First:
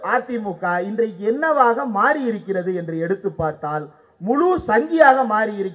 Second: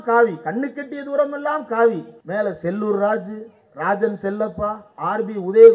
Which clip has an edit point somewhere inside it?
second; 1 cut; at 2.1 s

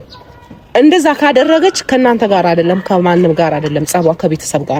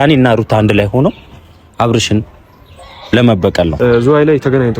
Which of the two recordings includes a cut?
second; 1 cut; at 3.7 s

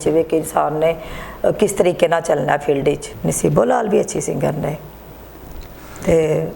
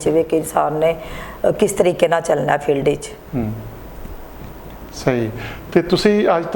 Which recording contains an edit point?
first; 1 cut; at 3.1 s

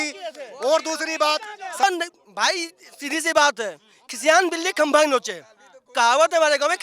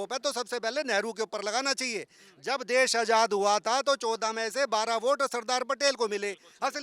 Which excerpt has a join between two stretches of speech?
first; 1 cut; at 1.8 s

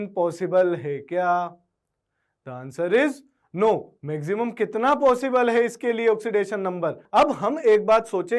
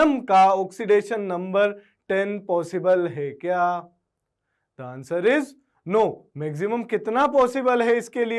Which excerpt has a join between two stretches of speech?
first; 1 cut; at 7.0 s

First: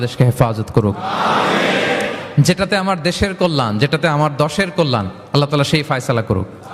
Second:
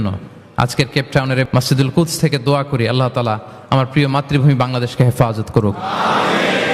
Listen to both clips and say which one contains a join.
second; 1 cut; at 1.5 s

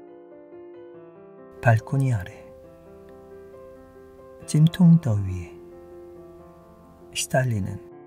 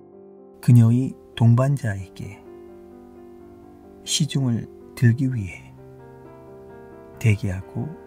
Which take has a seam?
first; 5 cuts; at 1.0 s, 2.4 s, 4.1 s, 5.6 s, 7.3 s

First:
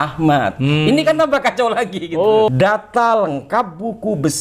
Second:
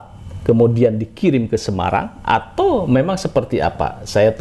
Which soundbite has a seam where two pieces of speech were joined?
first; 1 cut; at 2.5 s

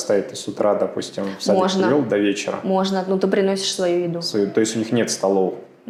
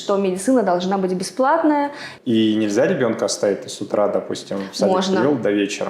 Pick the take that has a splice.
second; 1 cut; at 2.1 s

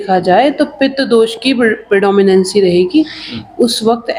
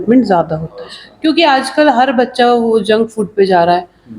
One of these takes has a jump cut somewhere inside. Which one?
second; 1 cut; at 1.0 s

